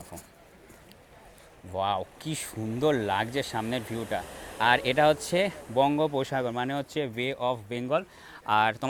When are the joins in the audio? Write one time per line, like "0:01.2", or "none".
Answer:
none

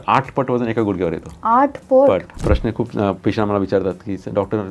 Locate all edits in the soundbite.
0:02.3

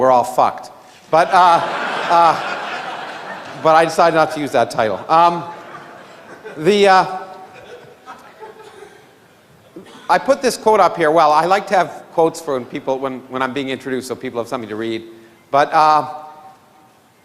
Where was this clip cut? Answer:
0:14.7

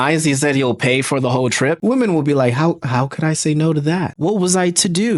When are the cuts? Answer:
0:01.8
0:04.1

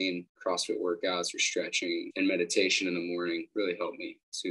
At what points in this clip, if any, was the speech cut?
0:02.1
0:03.5

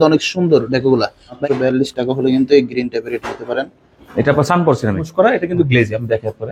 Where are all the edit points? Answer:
0:01.3
0:05.1

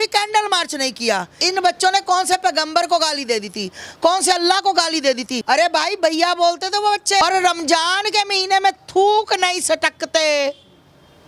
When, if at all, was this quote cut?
0:01.4
0:07.2

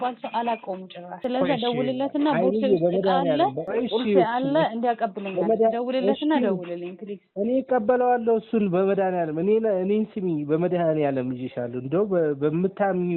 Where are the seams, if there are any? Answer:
none

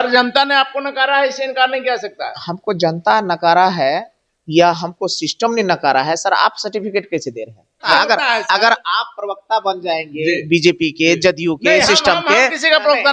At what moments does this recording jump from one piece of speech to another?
0:07.9

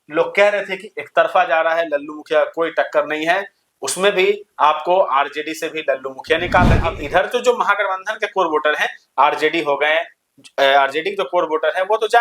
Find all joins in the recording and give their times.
0:07.0

